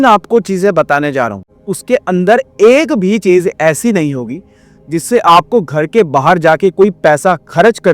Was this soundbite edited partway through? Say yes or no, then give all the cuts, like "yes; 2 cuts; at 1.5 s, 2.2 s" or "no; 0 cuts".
yes; 1 cut; at 1.5 s